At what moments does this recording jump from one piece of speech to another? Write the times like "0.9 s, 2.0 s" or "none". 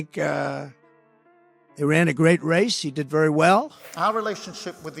3.8 s